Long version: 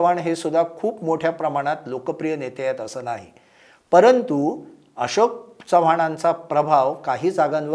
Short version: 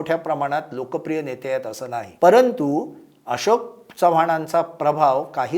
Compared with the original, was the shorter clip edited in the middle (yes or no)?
yes